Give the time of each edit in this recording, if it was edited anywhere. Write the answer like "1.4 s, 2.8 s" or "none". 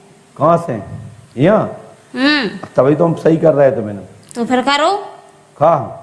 none